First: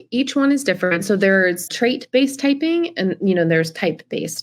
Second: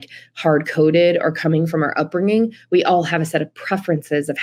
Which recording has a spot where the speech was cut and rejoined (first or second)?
first